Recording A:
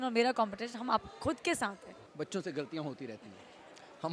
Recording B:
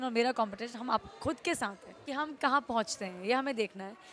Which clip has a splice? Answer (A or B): A